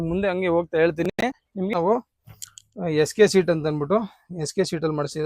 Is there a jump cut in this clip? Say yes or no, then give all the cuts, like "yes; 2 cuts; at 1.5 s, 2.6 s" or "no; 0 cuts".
yes; 1 cut; at 1.7 s